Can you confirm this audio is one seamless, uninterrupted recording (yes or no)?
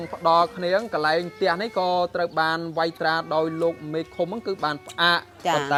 yes